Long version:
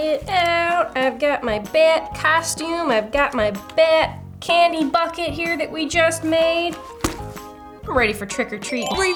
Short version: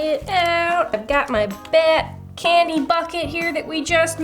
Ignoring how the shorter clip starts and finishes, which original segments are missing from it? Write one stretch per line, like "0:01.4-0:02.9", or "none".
0:00.9-0:03.0